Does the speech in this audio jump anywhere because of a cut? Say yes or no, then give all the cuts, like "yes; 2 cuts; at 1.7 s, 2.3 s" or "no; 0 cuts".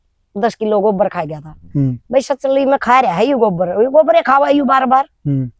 no; 0 cuts